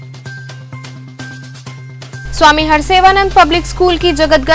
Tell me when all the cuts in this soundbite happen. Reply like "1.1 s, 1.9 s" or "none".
1.9 s